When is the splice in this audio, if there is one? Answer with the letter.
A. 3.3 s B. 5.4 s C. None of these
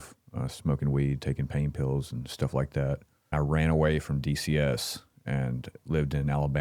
A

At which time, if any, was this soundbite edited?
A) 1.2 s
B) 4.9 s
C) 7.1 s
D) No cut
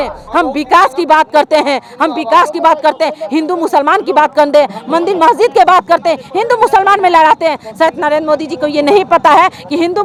D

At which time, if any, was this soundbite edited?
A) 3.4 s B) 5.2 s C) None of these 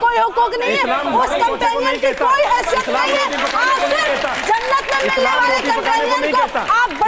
C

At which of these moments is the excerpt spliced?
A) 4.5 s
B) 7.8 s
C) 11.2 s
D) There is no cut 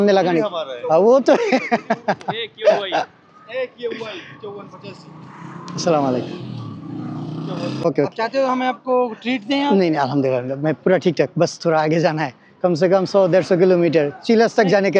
B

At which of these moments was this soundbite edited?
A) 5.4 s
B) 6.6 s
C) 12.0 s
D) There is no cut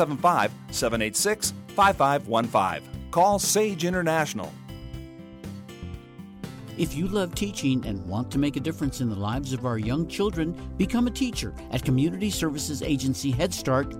B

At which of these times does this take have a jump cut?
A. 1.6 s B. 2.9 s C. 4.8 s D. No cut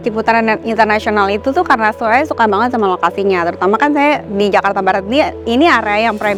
D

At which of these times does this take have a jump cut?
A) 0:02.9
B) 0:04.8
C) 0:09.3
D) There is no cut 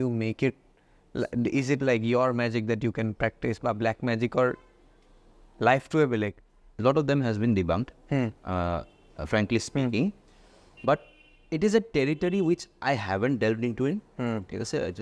D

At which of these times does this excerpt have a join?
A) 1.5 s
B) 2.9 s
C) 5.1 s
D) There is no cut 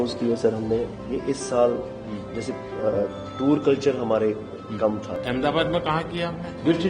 C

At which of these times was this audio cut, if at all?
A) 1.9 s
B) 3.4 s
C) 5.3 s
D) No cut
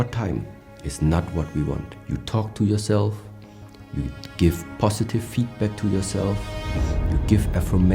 A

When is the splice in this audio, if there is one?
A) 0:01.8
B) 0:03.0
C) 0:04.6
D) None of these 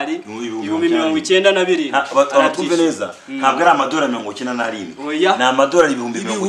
D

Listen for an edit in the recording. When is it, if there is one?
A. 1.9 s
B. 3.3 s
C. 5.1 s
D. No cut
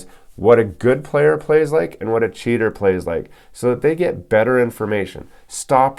D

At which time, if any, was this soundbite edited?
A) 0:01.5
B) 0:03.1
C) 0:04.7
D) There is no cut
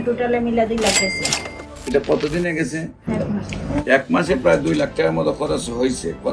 B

